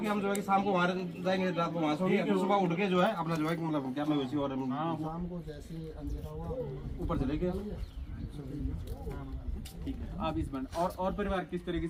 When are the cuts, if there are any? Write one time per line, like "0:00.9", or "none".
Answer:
none

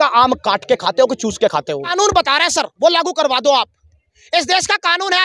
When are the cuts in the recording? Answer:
0:01.9

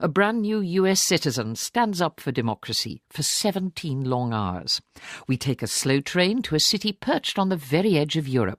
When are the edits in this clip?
none

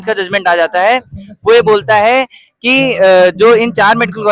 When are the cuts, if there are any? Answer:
none

